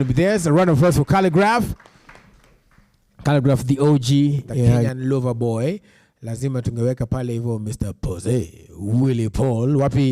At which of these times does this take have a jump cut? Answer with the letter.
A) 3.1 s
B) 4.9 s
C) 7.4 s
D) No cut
B